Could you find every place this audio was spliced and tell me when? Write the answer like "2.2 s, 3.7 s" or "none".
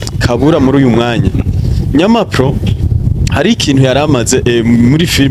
none